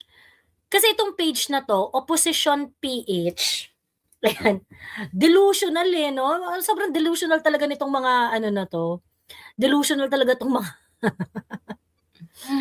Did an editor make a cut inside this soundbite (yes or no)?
no